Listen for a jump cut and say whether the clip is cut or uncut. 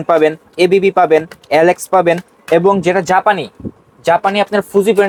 uncut